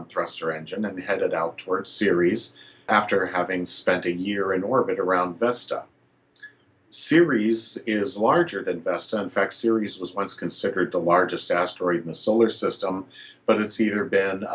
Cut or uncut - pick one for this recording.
cut